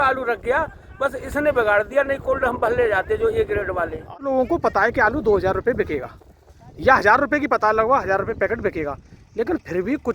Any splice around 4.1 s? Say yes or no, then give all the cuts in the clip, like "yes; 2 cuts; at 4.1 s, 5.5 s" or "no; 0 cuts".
yes; 1 cut; at 4.1 s